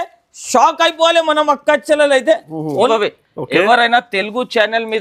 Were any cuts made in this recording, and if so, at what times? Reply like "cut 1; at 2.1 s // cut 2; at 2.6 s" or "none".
cut 1; at 2.9 s